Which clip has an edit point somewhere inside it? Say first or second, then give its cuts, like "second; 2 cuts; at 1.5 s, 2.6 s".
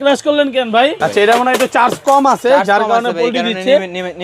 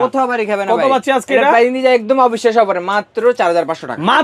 first; 1 cut; at 1.0 s